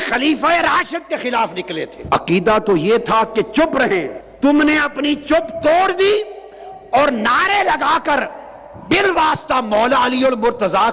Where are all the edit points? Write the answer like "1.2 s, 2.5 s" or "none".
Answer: 1.9 s, 4.2 s